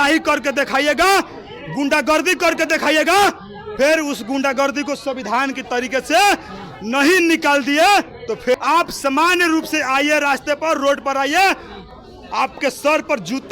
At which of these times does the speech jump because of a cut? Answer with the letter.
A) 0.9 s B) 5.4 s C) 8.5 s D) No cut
C